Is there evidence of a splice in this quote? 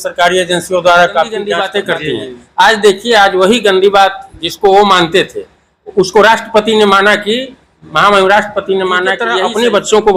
yes; 2 cuts; at 1.7 s, 9.3 s

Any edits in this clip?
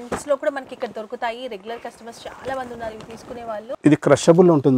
yes; 1 cut; at 3.6 s

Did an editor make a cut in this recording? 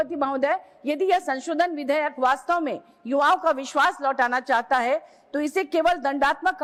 no; 0 cuts

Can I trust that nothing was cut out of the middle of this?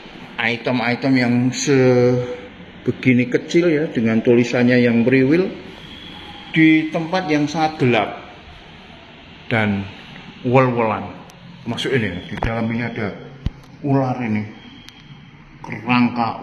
yes; 0 cuts

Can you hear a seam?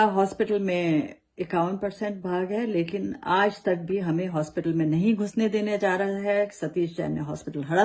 no; 0 cuts

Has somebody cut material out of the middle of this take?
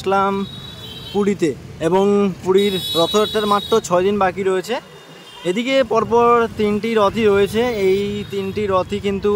no; 0 cuts

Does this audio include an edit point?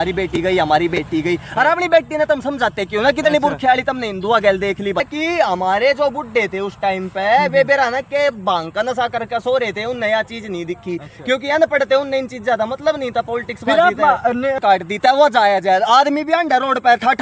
yes; 2 cuts; at 5.0 s, 14.6 s

